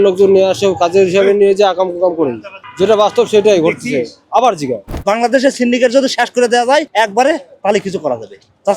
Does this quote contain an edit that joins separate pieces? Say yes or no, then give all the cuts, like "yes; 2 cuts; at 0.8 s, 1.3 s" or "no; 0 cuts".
yes; 1 cut; at 4.9 s